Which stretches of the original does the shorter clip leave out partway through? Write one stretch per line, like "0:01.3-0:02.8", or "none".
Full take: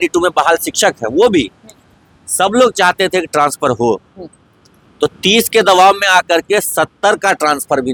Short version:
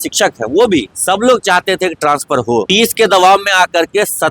0:01.6-0:02.3
0:04.0-0:05.2